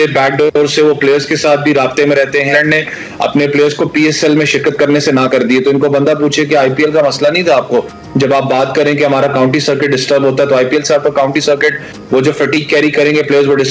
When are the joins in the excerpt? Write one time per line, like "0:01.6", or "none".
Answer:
0:02.5